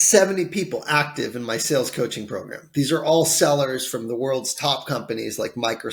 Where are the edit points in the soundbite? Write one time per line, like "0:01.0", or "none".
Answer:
none